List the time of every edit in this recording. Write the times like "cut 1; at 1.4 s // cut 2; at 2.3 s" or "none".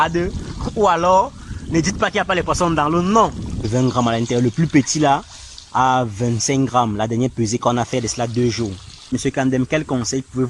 cut 1; at 3.7 s // cut 2; at 9.1 s